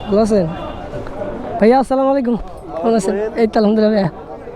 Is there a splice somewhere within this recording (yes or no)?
yes